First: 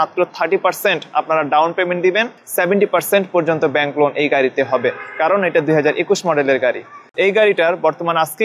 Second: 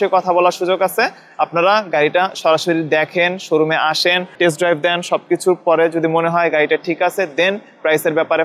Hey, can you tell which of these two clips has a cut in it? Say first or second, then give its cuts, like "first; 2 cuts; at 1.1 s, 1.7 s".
first; 2 cuts; at 2.3 s, 7.0 s